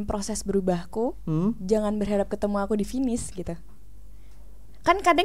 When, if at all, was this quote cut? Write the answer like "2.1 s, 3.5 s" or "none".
none